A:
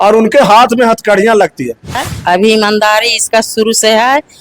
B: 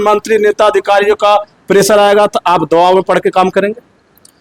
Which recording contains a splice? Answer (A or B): A